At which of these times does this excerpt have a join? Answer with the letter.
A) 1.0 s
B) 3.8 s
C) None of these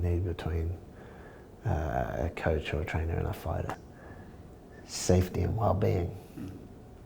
B